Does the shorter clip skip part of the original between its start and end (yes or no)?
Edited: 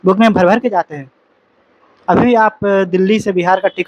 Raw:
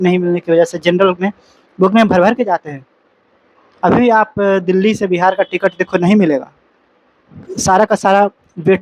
no